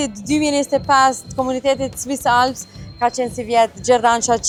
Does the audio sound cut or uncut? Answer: uncut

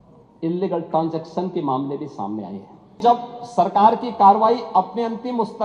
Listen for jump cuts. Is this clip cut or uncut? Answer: cut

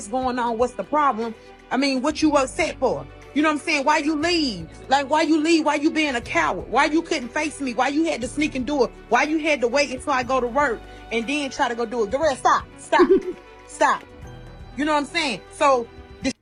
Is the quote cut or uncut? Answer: uncut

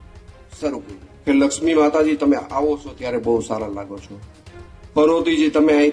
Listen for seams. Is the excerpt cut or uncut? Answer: cut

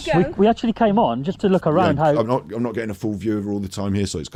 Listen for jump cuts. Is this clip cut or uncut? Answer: uncut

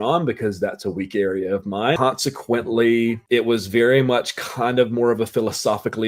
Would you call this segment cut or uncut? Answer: cut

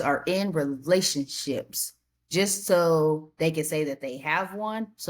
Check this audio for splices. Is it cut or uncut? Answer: uncut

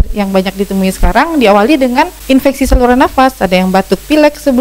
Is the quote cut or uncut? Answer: cut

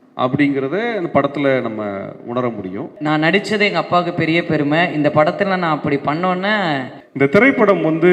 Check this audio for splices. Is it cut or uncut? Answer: cut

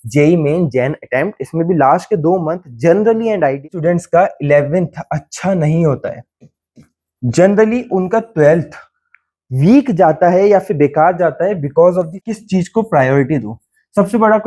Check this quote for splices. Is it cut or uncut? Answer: cut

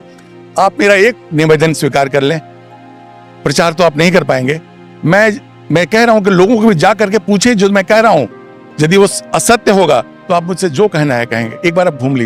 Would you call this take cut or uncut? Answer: uncut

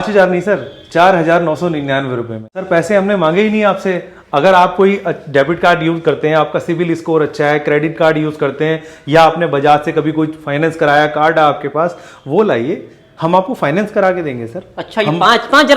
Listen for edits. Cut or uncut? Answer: cut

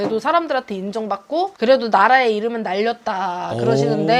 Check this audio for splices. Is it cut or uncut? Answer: uncut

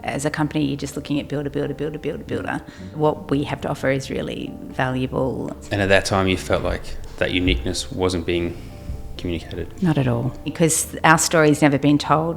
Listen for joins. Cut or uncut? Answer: cut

